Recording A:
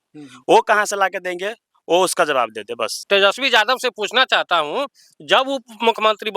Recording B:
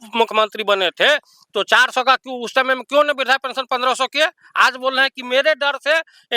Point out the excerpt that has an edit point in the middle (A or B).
A